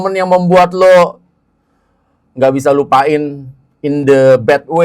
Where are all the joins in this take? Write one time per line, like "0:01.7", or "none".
none